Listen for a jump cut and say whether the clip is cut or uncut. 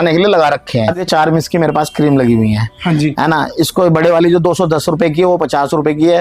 cut